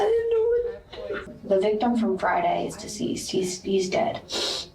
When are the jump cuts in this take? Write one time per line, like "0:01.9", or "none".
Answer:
0:01.3